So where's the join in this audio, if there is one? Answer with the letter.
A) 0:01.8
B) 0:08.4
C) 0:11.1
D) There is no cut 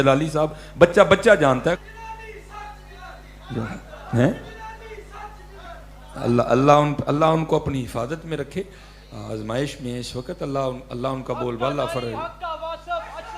A